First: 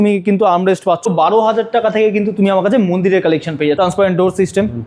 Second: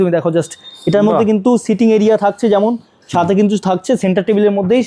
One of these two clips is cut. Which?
first; 2 cuts; at 1.1 s, 3.8 s

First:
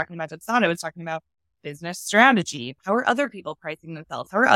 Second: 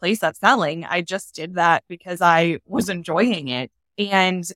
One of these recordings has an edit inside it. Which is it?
first; 1 cut; at 2.7 s

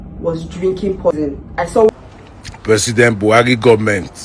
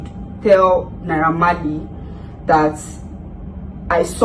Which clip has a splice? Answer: first; 1 cut; at 1.9 s

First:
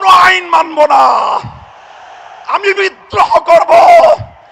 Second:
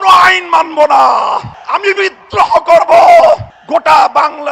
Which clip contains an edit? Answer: second; 2 cuts; at 1.5 s, 3.5 s

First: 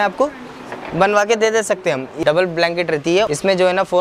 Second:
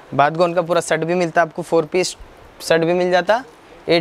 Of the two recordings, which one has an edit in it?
first; 2 cuts; at 2.1 s, 3.3 s

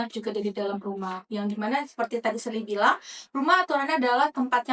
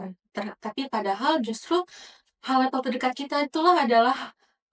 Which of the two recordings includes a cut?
first; 1 cut; at 1.2 s

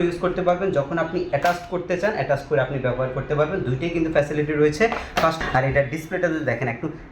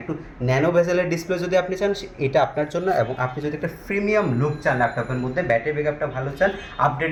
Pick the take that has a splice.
first; 1 cut; at 5.3 s

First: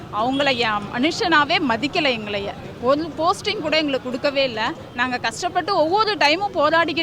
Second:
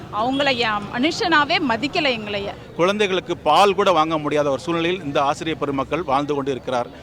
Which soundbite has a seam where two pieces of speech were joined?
second; 1 cut; at 2.6 s

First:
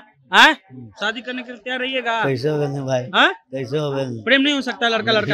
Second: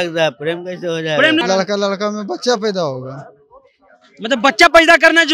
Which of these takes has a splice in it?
second; 1 cut; at 1.4 s

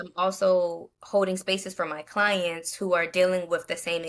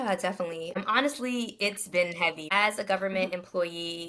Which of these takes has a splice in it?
second; 2 cuts; at 0.8 s, 2.4 s

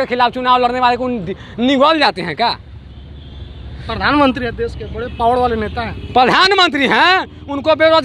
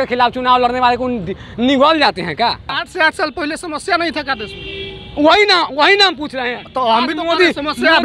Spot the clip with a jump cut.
second; 1 cut; at 2.7 s

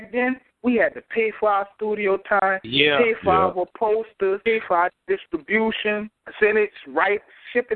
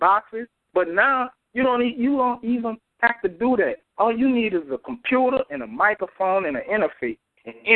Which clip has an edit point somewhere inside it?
first; 2 cuts; at 4.4 s, 6.2 s

